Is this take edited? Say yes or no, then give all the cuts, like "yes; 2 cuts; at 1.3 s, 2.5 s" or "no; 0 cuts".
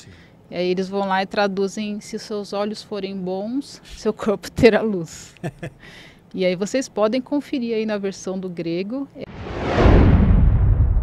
yes; 1 cut; at 9.1 s